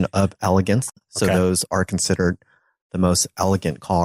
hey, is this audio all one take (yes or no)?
yes